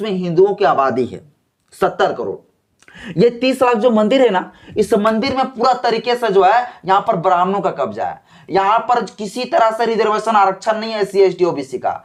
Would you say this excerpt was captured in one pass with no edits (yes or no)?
yes